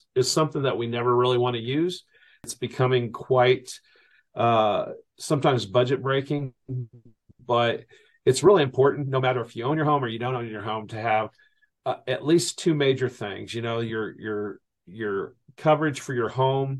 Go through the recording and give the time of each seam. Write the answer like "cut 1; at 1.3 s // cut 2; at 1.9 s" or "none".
cut 1; at 2.4 s